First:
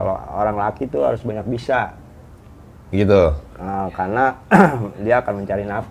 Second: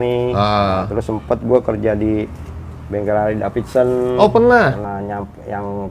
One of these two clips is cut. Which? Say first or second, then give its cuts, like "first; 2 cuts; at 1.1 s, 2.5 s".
second; 1 cut; at 4.8 s